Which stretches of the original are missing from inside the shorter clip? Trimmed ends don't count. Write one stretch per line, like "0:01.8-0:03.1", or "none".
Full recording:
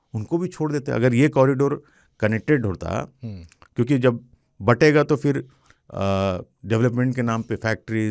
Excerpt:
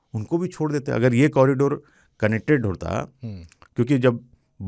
none